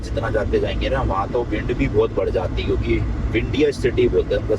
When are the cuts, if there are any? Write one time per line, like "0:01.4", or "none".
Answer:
none